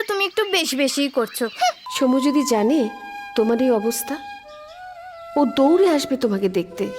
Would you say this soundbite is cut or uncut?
cut